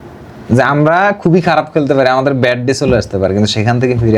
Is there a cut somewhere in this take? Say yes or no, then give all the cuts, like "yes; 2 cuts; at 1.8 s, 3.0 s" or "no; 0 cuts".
no; 0 cuts